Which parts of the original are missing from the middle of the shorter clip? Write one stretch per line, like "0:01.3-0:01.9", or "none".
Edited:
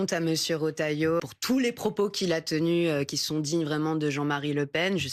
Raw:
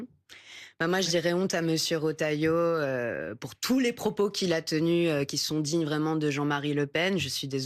0:02.6-0:03.4